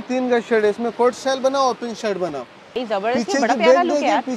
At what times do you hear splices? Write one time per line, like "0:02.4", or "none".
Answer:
0:02.7